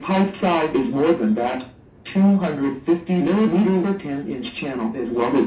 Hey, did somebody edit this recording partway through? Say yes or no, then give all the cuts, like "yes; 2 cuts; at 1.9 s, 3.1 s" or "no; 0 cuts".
no; 0 cuts